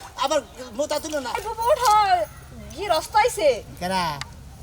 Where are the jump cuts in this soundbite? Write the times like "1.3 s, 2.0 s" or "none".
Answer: 1.5 s